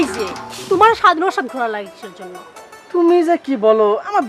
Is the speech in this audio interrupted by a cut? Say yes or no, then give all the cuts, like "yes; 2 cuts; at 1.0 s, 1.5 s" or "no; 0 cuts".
no; 0 cuts